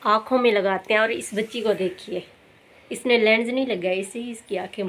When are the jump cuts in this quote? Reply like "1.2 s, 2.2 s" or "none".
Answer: none